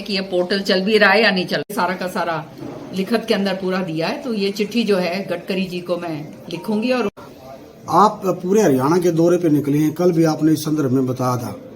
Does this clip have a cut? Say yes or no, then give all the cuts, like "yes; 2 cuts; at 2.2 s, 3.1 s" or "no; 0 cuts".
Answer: yes; 2 cuts; at 1.7 s, 7.1 s